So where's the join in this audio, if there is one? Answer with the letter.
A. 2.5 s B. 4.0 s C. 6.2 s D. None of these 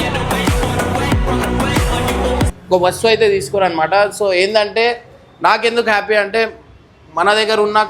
A